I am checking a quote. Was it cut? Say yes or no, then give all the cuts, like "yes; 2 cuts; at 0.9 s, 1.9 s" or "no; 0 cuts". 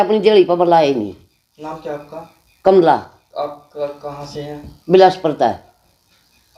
no; 0 cuts